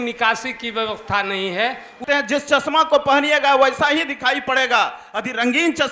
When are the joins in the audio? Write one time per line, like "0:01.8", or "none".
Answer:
0:02.0